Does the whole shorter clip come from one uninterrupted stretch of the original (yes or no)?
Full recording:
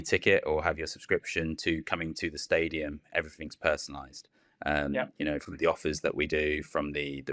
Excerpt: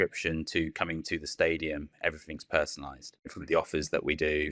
no